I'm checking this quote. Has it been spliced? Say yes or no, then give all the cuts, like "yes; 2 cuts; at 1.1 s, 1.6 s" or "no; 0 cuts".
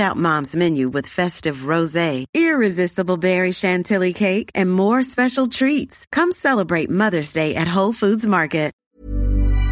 yes; 1 cut; at 8.8 s